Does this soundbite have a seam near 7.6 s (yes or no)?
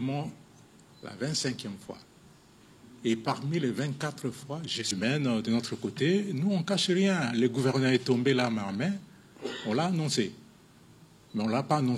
no